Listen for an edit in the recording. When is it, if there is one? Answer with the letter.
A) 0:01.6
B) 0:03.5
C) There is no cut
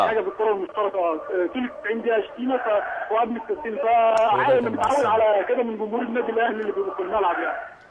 B